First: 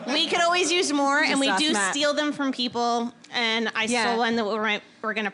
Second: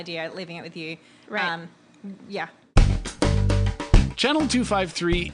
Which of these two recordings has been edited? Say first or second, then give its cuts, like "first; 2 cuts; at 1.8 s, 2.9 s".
second; 1 cut; at 2.6 s